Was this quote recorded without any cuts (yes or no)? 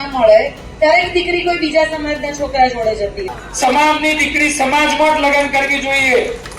no